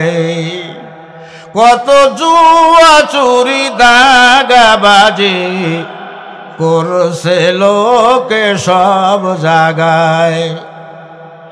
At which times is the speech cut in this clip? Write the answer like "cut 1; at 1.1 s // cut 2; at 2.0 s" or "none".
none